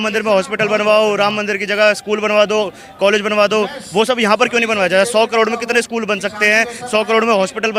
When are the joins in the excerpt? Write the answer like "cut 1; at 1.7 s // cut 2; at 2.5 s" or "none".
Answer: none